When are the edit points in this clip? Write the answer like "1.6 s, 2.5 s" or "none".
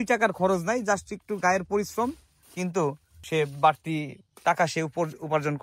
2.4 s, 3.2 s